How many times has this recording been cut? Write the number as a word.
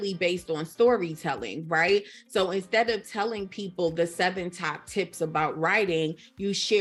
zero